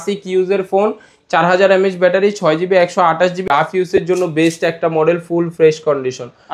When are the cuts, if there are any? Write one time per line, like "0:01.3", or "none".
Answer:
0:03.4